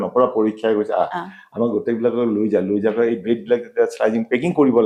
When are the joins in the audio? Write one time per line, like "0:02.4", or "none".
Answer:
none